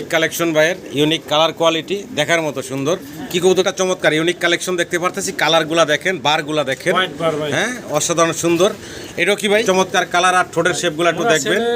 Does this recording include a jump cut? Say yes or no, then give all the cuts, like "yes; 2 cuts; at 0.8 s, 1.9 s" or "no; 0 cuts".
yes; 2 cuts; at 3.6 s, 9.6 s